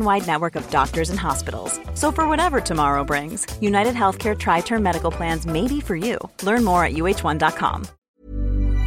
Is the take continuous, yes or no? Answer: no